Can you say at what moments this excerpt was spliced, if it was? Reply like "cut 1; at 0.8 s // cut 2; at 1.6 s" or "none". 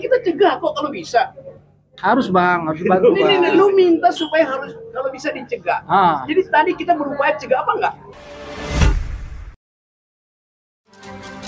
cut 1; at 8.0 s